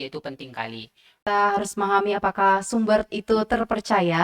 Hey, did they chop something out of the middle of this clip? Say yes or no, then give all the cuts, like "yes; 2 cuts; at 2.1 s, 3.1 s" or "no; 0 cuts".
yes; 1 cut; at 1.2 s